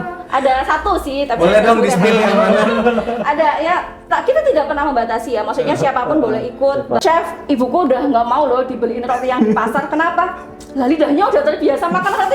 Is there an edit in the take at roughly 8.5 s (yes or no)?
no